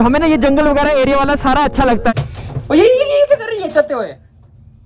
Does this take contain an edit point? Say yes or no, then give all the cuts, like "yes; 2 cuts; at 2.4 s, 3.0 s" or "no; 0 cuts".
yes; 1 cut; at 2.1 s